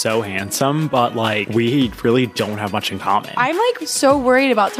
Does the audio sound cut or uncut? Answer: cut